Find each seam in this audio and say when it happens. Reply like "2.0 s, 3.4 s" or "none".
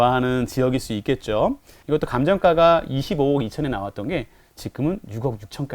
1.7 s